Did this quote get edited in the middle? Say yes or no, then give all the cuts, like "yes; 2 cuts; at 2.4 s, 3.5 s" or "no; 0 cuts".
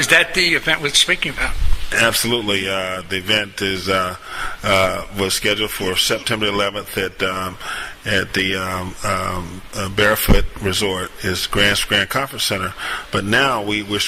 no; 0 cuts